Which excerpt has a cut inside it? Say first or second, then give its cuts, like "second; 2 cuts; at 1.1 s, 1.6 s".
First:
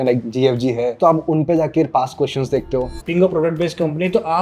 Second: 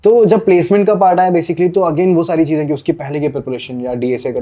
first; 1 cut; at 3.0 s